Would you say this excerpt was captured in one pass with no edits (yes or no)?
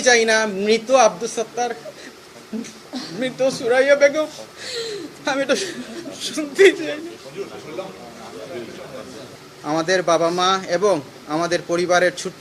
no